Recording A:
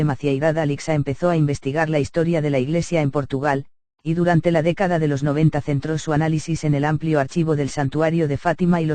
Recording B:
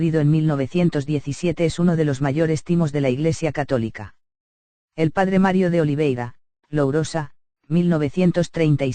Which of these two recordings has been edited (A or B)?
A